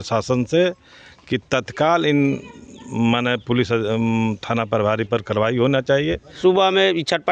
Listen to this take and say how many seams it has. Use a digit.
1